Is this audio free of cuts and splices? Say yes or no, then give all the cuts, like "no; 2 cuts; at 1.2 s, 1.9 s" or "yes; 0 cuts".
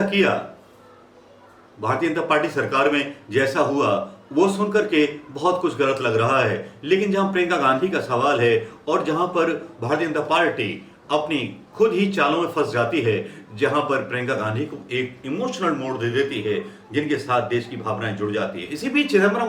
yes; 0 cuts